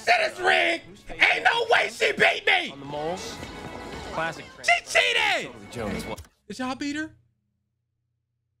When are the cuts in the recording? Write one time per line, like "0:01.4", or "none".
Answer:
none